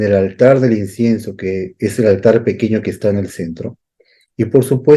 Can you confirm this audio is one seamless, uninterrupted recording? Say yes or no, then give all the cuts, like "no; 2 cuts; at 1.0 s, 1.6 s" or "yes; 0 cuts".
yes; 0 cuts